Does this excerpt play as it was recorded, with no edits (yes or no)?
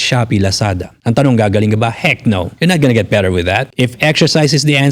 no